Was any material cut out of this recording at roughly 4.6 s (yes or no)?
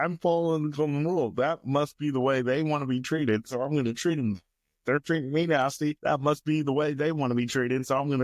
no